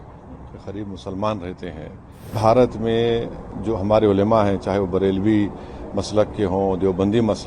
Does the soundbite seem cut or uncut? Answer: cut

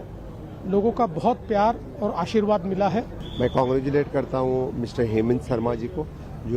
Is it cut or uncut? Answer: cut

